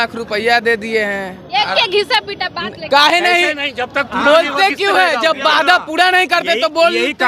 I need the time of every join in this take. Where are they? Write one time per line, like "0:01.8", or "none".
none